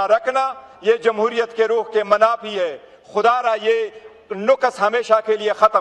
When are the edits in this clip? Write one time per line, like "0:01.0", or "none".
none